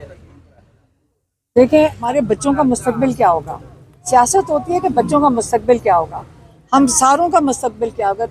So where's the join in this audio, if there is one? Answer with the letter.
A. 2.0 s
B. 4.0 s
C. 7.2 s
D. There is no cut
A